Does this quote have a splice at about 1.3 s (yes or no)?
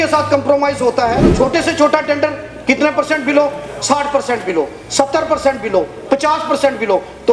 yes